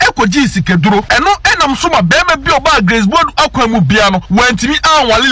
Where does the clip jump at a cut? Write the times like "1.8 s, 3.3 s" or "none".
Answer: 1.1 s, 4.2 s